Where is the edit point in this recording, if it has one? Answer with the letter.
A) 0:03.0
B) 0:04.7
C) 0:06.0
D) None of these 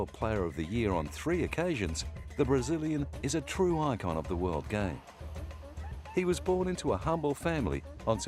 D